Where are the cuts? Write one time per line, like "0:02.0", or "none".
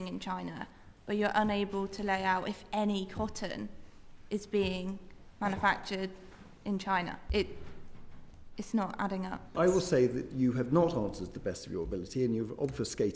0:07.2
0:09.4